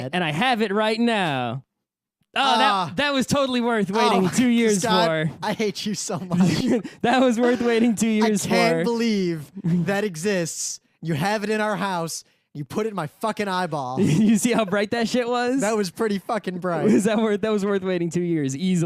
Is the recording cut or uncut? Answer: cut